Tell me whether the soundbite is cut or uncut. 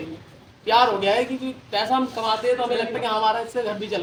uncut